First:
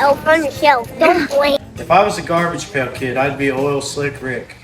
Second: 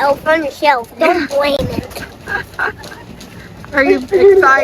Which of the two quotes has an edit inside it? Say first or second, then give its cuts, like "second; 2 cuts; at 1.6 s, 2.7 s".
first; 1 cut; at 1.6 s